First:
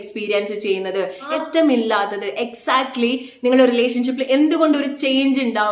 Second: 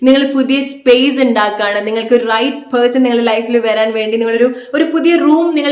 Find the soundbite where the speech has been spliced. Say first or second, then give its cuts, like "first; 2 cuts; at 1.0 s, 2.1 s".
first; 1 cut; at 1.3 s